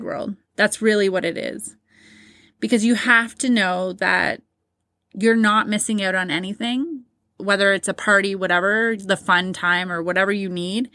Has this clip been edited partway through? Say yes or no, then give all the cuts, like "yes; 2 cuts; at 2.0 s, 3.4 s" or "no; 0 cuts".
yes; 1 cut; at 7.3 s